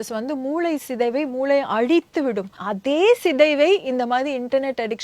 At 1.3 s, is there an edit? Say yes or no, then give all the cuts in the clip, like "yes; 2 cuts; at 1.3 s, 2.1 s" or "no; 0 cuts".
no; 1 cut; at 2.6 s